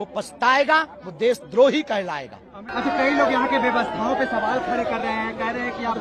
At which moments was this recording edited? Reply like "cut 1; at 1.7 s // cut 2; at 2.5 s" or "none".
none